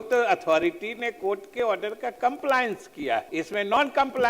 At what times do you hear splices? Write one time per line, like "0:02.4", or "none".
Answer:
0:03.3